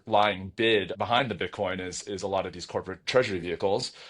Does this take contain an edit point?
yes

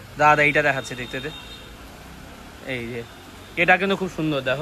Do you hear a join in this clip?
no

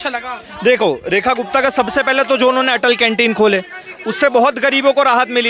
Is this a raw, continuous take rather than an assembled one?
yes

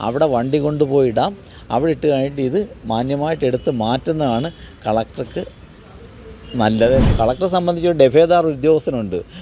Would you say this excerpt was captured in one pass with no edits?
no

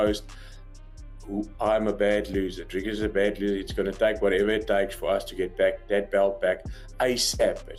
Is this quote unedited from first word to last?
yes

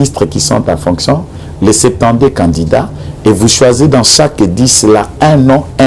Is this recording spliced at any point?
no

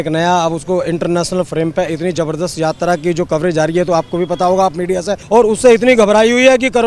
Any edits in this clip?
yes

